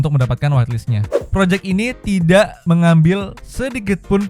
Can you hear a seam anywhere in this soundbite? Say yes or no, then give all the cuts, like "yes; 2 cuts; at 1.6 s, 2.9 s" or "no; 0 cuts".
yes; 2 cuts; at 1.2 s, 2.6 s